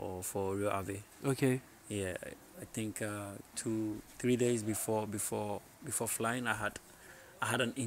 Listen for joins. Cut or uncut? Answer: uncut